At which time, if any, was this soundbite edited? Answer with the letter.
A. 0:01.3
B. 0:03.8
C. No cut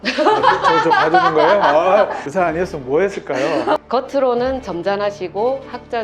B